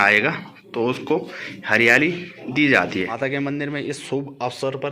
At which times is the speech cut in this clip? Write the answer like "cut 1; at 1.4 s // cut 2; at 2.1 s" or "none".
cut 1; at 3.1 s